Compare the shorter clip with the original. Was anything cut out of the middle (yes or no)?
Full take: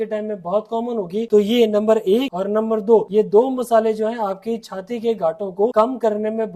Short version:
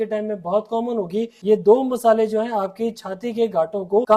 yes